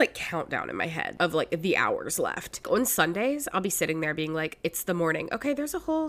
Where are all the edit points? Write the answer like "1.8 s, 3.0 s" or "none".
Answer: 1.1 s, 2.7 s

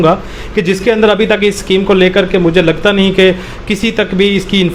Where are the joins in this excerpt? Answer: none

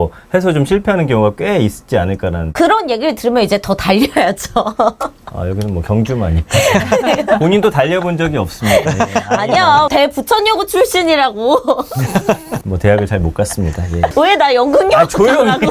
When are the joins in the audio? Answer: 12.5 s

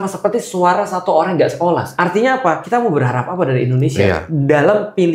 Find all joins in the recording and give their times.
1.9 s, 2.6 s, 4.3 s

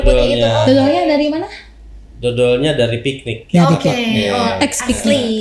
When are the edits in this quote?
none

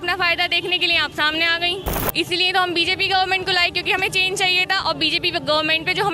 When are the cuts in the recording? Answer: 2.0 s

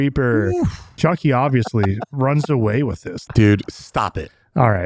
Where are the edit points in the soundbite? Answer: 1.0 s, 3.2 s

